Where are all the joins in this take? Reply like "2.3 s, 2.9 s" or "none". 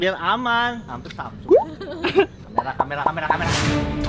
2.5 s